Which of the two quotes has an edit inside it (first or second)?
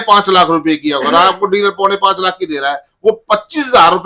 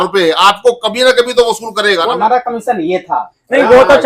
second